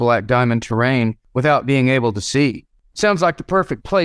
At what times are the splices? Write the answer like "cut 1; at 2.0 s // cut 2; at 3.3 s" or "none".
cut 1; at 1.2 s // cut 2; at 2.7 s